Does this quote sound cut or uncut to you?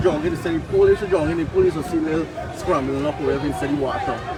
uncut